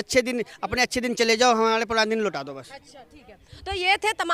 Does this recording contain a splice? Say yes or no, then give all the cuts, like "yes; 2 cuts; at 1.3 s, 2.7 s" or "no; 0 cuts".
no; 0 cuts